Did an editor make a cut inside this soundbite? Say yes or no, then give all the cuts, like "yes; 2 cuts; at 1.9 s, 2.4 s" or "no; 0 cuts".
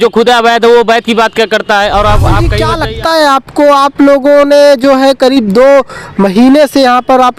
yes; 1 cut; at 2.6 s